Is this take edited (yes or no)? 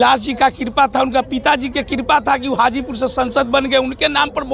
no